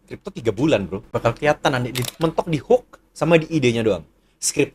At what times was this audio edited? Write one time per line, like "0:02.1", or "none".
0:01.0
0:02.1